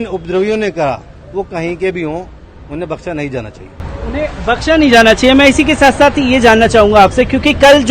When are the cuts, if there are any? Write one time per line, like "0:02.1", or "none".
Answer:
none